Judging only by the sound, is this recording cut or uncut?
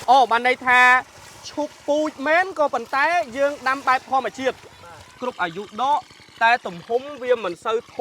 cut